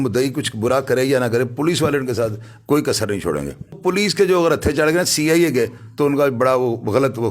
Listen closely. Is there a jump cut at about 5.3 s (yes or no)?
no